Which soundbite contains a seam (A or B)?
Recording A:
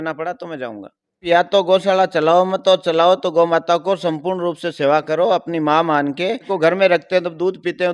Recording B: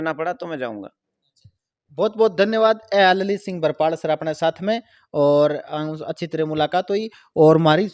A